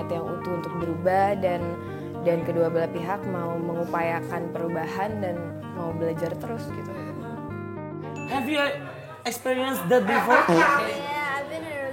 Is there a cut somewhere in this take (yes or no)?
yes